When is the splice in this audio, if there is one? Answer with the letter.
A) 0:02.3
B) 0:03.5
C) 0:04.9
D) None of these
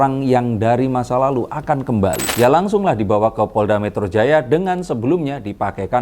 A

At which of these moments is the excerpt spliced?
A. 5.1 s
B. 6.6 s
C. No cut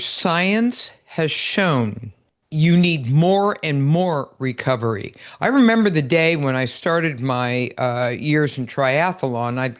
C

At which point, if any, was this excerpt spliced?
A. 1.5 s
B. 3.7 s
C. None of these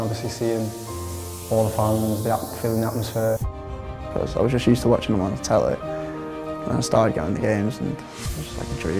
B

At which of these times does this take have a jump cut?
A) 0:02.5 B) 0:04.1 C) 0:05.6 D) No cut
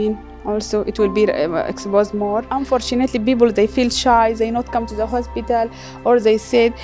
A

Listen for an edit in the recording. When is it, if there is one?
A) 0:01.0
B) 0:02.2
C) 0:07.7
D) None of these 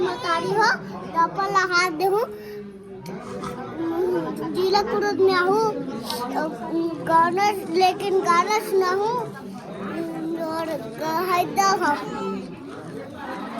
D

